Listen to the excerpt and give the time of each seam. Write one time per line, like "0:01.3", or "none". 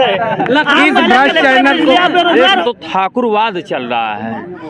0:02.6